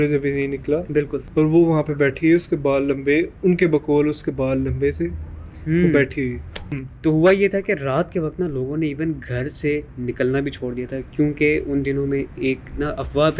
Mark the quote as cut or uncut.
cut